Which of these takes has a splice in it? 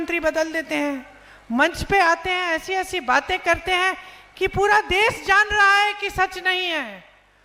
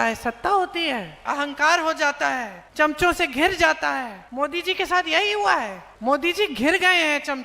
second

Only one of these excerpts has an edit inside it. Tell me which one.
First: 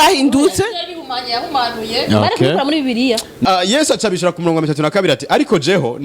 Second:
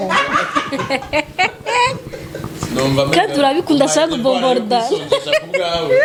first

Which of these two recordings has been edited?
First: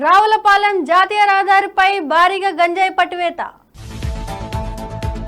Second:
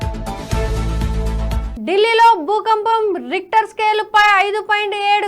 second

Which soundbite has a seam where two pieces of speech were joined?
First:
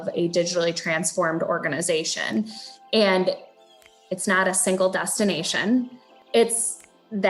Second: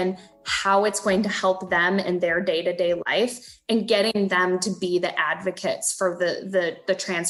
first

